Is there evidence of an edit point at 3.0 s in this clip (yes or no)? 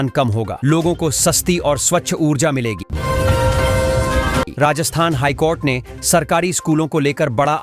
no